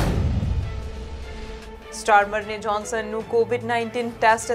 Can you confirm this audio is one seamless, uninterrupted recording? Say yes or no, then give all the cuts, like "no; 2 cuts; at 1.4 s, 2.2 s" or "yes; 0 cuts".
yes; 0 cuts